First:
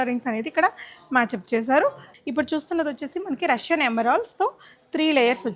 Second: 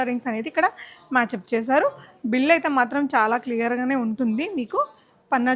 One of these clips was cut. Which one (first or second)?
first